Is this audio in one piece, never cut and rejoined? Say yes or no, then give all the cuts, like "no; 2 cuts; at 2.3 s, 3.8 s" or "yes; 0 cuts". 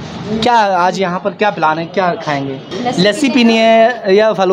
no; 1 cut; at 2.7 s